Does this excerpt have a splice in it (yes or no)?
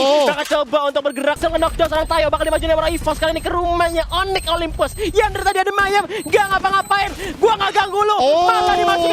yes